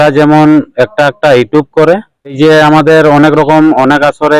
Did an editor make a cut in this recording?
yes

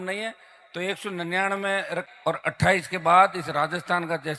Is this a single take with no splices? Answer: no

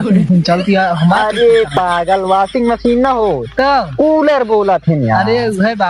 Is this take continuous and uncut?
yes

